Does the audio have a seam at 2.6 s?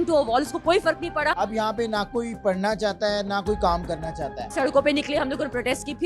no; 2 cuts; at 1.3 s, 4.4 s

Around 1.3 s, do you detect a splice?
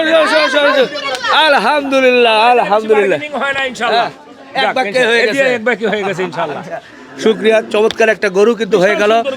no; 0 cuts

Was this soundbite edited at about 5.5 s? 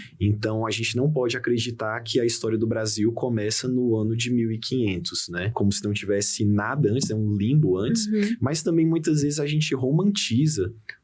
yes; 1 cut; at 5.5 s

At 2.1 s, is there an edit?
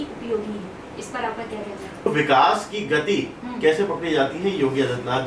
yes; 1 cut; at 2.1 s

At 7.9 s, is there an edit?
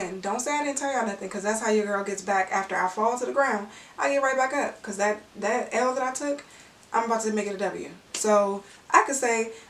yes; 1 cut; at 7.9 s

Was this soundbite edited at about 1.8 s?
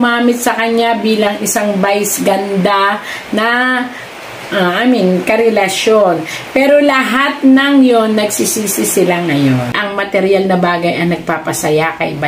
no; 1 cut; at 9.7 s

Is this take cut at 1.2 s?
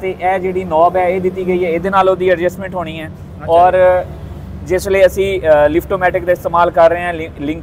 no; 0 cuts

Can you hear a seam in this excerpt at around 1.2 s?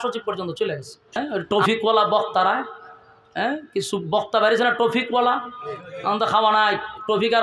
yes; 1 cut; at 1.2 s

